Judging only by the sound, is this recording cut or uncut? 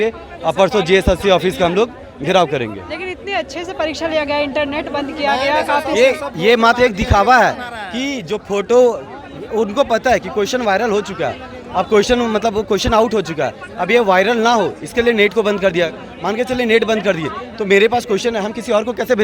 uncut